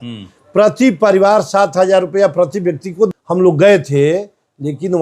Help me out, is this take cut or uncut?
cut